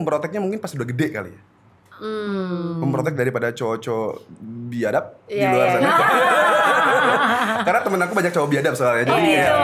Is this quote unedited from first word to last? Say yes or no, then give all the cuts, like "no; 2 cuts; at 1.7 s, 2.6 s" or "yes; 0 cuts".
yes; 0 cuts